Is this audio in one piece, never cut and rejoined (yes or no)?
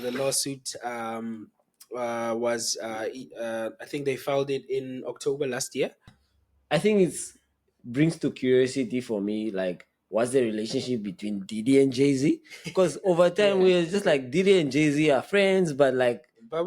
no